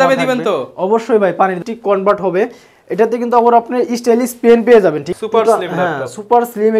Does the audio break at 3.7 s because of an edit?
no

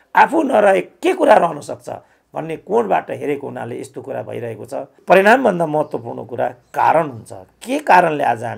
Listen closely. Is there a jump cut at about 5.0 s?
yes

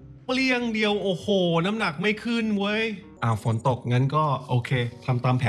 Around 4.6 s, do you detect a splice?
no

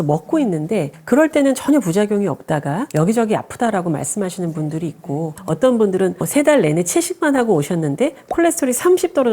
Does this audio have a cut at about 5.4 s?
yes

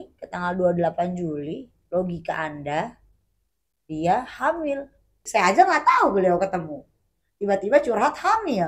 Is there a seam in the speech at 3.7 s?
no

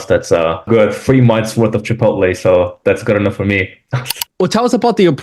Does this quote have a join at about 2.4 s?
no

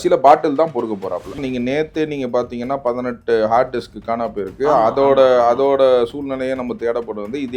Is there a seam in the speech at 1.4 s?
yes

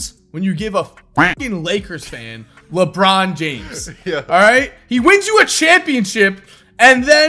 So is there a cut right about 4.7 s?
no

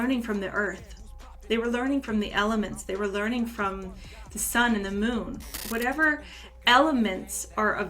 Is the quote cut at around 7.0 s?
no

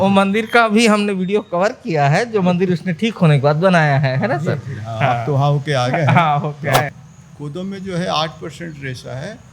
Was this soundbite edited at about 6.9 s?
yes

